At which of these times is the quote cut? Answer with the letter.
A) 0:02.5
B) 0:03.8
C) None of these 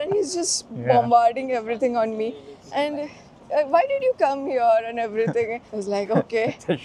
C